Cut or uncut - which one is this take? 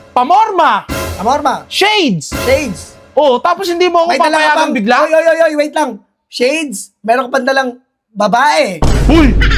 uncut